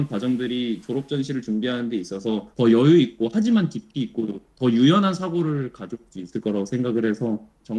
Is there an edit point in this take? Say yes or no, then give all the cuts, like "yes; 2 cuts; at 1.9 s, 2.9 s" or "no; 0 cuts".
no; 0 cuts